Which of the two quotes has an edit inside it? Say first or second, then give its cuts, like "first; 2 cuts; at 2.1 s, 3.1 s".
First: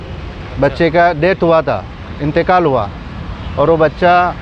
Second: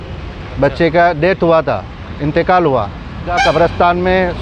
second; 1 cut; at 3.3 s